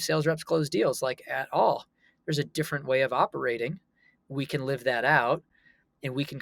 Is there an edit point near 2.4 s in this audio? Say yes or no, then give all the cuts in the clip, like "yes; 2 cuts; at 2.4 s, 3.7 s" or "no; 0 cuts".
no; 0 cuts